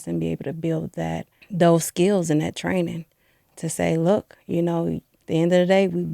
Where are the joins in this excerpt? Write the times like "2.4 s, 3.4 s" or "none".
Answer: 1.4 s, 5.1 s